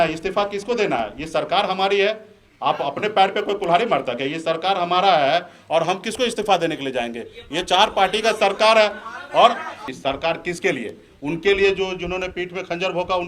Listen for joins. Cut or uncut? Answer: cut